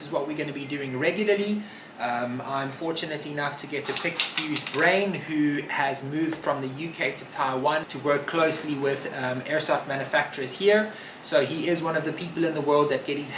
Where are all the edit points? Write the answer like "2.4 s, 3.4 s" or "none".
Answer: 7.9 s